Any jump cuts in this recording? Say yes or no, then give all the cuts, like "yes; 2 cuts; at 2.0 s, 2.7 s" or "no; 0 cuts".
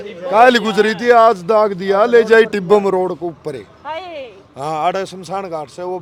no; 0 cuts